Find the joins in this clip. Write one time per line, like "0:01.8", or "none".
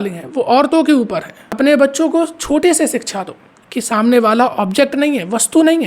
0:01.4